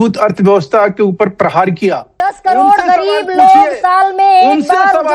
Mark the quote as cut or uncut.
cut